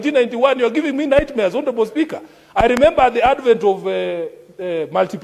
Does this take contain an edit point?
no; 0 cuts

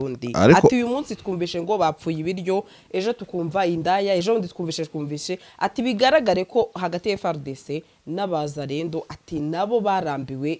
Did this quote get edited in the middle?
no; 0 cuts

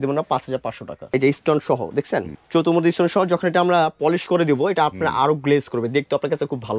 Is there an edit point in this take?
yes; 2 cuts; at 1.1 s, 2.4 s

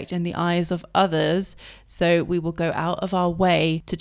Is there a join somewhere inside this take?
no; 0 cuts

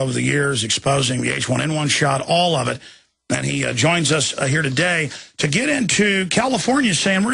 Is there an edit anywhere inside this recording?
no; 0 cuts

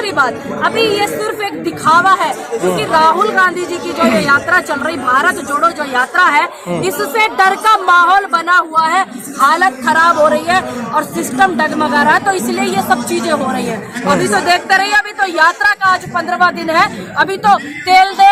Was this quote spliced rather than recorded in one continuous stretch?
no; 0 cuts

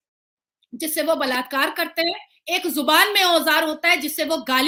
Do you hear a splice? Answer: no; 0 cuts

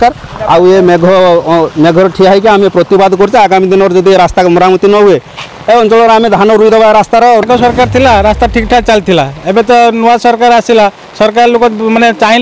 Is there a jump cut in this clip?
yes; 1 cut; at 7.4 s

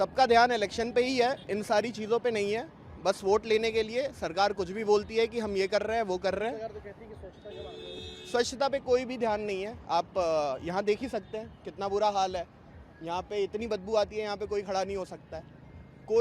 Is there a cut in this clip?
no; 0 cuts

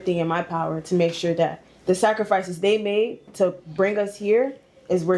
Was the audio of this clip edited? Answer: no; 0 cuts

